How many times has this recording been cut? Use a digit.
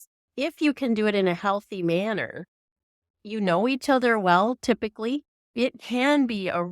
1